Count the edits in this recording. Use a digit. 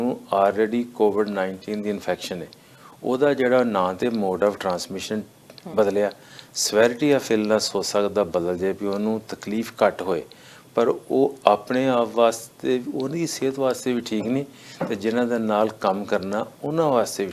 0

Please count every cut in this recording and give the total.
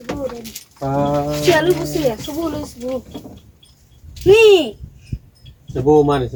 0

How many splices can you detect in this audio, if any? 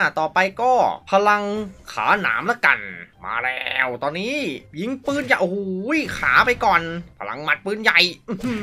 0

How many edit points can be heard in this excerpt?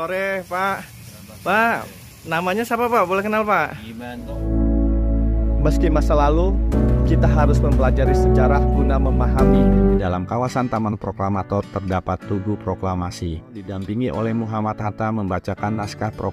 3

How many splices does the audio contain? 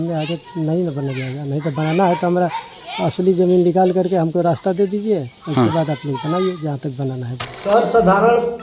1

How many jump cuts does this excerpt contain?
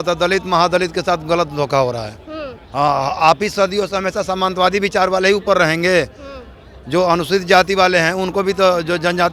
0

